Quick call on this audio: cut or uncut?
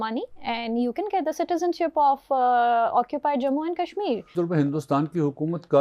cut